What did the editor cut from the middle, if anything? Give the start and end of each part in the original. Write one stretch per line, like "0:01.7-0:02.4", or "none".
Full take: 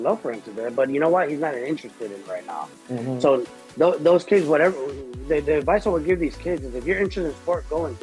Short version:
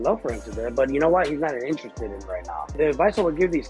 0:02.7-0:05.4